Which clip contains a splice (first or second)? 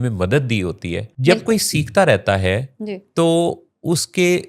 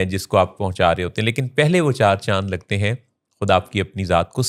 first